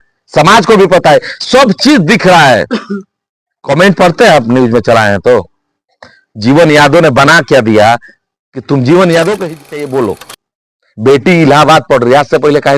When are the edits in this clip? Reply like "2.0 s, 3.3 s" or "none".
9.5 s